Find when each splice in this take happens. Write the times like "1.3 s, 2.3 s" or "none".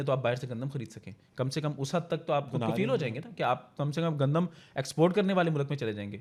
none